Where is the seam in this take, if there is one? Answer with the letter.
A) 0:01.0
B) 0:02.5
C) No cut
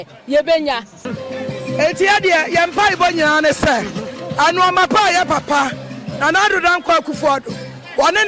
A